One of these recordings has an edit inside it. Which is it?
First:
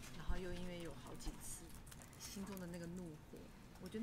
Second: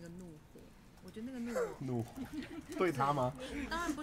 first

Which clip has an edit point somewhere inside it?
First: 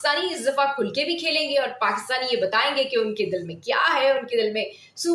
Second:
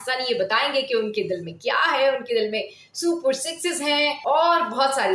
second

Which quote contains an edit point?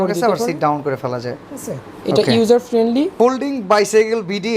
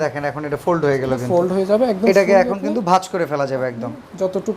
first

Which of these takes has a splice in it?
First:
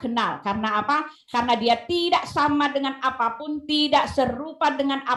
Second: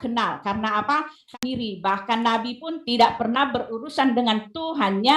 second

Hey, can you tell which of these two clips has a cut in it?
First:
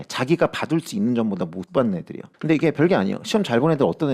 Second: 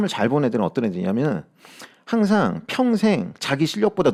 first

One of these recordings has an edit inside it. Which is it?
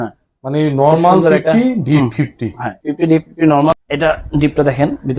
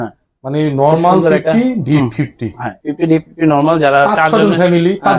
first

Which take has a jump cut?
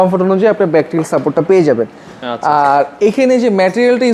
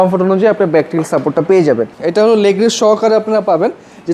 second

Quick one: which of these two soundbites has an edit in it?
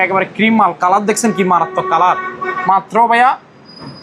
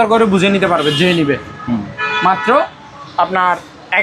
first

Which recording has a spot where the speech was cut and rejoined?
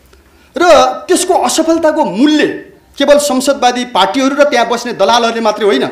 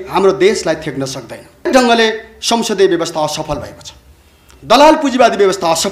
second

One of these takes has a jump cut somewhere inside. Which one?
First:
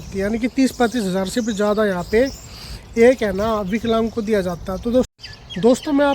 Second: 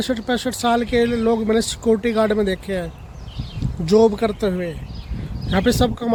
first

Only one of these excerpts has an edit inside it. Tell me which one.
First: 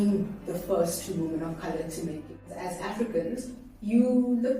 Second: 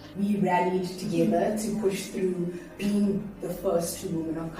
first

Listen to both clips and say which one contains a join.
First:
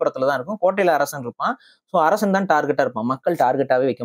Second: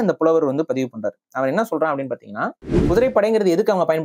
second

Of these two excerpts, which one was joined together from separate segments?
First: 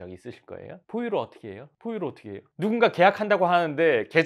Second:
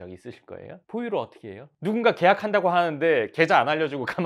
second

